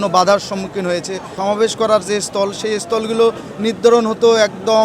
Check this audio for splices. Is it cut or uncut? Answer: cut